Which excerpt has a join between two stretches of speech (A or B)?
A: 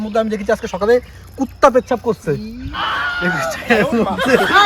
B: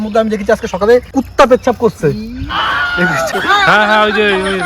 B